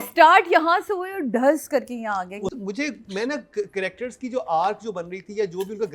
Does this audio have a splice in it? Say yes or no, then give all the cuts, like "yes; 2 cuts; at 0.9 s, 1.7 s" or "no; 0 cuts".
yes; 1 cut; at 2.6 s